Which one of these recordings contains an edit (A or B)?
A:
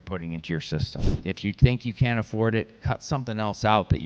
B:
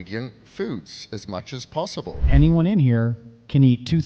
B